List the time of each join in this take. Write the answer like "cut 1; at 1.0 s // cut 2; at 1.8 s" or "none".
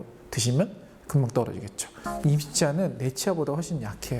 cut 1; at 1.9 s